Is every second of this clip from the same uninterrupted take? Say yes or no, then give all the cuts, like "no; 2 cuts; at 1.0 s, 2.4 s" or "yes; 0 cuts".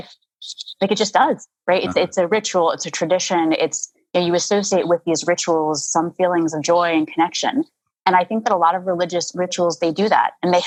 yes; 0 cuts